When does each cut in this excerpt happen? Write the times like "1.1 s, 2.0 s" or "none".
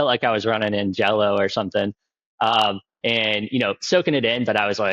none